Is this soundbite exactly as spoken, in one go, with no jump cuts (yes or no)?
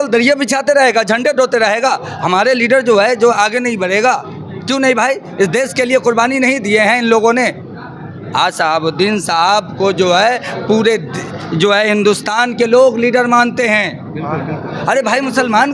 yes